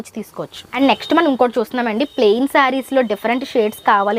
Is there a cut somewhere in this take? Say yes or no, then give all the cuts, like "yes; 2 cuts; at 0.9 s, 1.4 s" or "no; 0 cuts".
no; 0 cuts